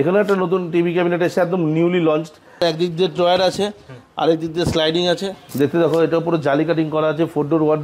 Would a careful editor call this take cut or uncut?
cut